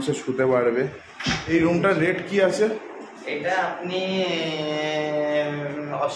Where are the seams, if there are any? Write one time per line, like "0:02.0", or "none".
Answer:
0:01.4